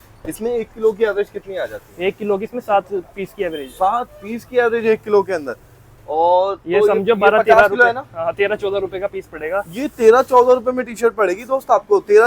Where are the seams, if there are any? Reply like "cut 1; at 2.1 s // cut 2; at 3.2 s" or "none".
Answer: none